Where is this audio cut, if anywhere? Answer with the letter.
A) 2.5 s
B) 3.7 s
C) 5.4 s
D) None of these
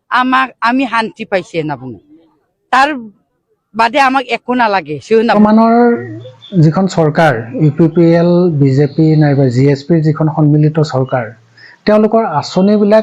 C